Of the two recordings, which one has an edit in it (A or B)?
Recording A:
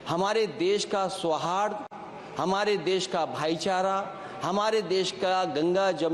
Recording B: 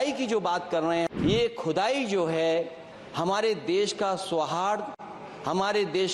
B